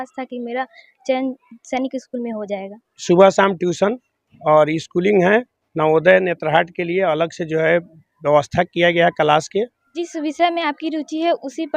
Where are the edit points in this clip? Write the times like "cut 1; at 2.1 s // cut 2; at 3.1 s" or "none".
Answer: cut 1; at 2.9 s // cut 2; at 9.8 s